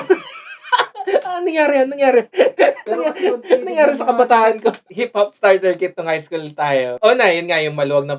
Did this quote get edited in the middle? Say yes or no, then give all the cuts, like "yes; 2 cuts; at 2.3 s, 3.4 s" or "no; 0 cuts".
yes; 2 cuts; at 4.9 s, 6.9 s